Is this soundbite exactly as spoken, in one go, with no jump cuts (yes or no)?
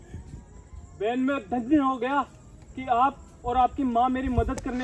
yes